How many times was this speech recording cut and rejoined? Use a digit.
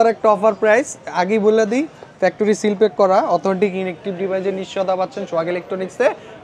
0